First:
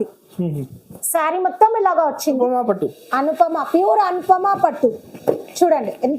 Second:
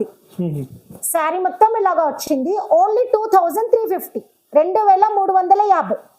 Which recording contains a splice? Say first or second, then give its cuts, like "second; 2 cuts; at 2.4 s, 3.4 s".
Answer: first; 1 cut; at 2.2 s